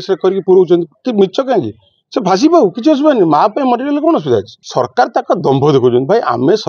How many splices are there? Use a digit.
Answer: 1